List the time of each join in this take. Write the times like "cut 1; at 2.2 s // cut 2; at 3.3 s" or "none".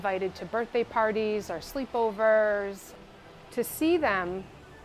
none